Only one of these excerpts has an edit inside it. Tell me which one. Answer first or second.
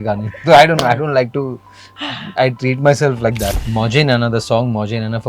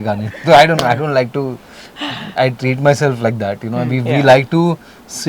first